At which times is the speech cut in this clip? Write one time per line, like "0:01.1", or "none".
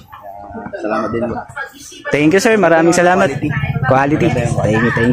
none